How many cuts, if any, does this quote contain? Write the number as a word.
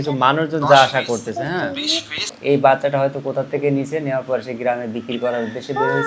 one